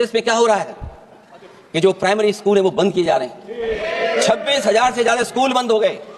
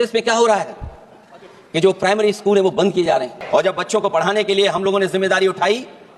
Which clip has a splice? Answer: second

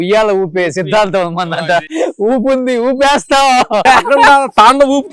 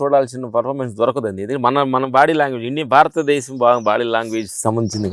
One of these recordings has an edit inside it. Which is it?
first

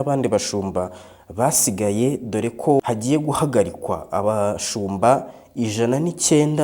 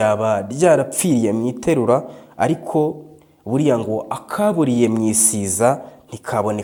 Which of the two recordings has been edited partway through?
first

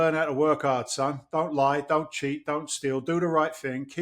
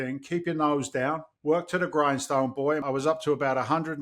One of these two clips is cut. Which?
second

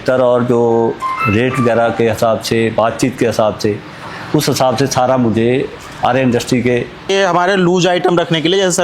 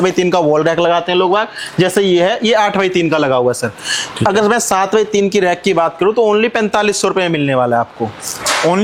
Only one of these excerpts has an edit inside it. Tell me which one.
first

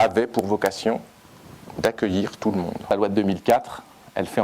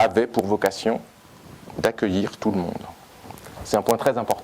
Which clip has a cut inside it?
first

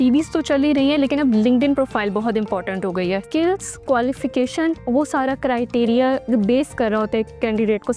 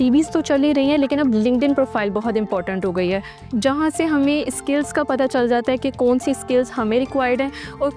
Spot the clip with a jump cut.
first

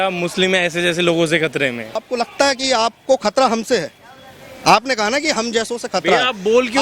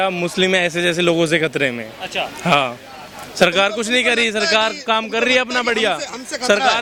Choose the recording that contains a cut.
first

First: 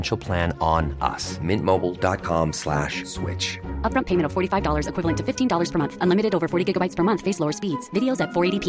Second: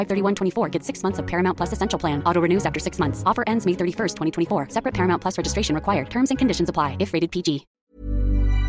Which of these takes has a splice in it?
second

